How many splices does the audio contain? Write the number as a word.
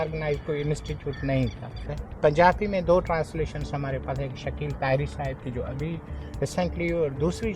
one